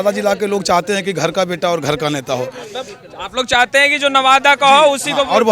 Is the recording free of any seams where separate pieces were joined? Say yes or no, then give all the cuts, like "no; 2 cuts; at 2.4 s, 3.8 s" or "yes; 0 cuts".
yes; 0 cuts